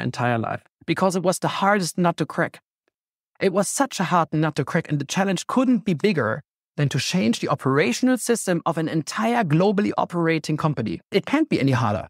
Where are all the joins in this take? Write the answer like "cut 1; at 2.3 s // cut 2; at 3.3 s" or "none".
cut 1; at 11.1 s

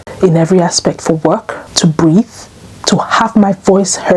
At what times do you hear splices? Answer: cut 1; at 1.6 s

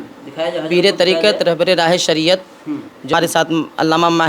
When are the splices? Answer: cut 1; at 3.1 s

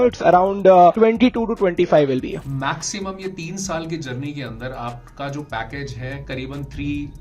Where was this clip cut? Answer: cut 1; at 2.3 s

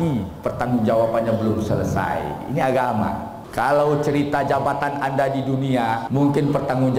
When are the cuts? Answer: cut 1; at 3.4 s // cut 2; at 6.0 s

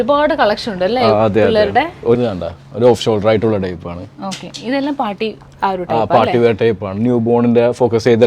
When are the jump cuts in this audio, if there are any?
cut 1; at 2.2 s

